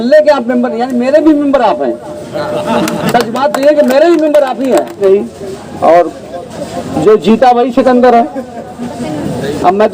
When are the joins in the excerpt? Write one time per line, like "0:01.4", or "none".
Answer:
0:05.0